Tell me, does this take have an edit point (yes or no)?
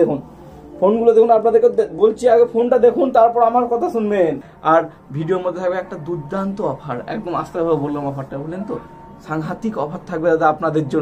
yes